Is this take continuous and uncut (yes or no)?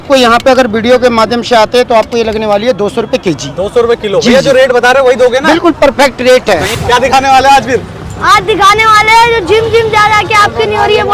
no